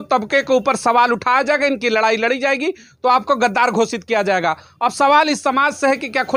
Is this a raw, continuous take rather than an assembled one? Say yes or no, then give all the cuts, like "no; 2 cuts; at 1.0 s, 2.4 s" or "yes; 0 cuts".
yes; 0 cuts